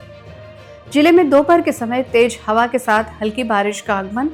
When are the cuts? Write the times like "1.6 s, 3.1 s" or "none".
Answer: none